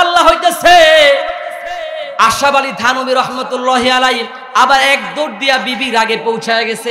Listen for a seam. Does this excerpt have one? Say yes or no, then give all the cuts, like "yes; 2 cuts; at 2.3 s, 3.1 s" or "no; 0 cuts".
no; 0 cuts